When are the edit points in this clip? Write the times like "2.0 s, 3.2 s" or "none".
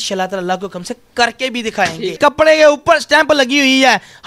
2.2 s

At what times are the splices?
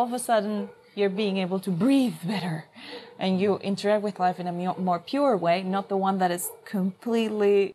none

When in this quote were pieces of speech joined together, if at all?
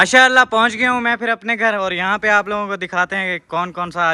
none

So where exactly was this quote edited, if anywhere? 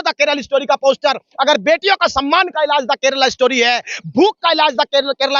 none

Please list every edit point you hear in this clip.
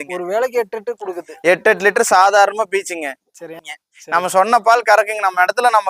3.6 s

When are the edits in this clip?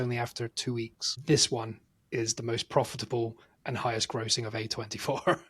1.1 s

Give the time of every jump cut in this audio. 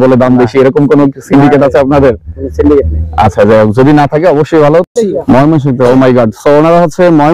5.0 s

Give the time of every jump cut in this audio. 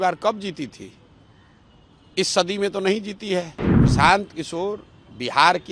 3.6 s

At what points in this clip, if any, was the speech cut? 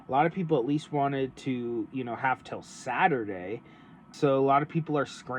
4.1 s

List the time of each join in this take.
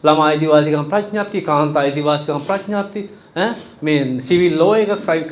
none

